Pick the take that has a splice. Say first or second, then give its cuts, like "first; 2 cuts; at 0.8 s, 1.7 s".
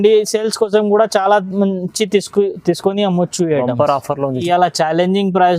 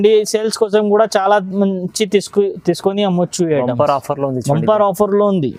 first; 1 cut; at 4.4 s